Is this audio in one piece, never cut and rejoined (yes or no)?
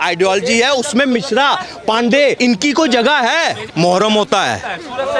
no